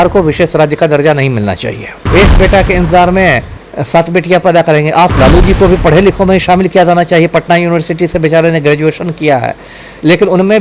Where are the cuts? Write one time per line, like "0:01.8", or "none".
0:01.9
0:05.1